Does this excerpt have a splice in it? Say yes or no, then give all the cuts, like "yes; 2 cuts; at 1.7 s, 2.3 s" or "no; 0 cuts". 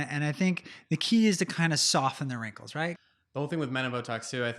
yes; 1 cut; at 3.0 s